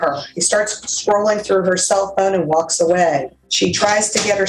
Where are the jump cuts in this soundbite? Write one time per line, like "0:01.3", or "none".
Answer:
0:03.4